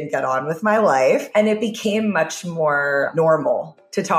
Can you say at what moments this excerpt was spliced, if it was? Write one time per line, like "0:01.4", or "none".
0:01.3
0:03.1